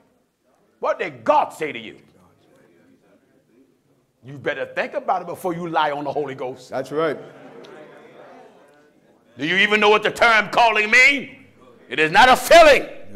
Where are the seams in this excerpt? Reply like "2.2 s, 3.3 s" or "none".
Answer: none